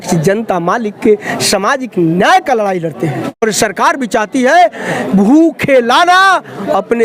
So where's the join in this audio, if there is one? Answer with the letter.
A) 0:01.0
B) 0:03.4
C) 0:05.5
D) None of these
B